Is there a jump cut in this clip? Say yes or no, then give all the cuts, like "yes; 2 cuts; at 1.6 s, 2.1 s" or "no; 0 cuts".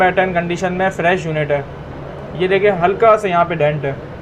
no; 0 cuts